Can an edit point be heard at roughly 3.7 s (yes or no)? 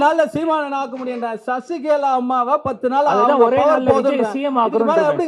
no